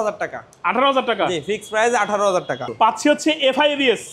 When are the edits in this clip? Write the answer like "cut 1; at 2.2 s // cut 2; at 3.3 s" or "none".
cut 1; at 2.7 s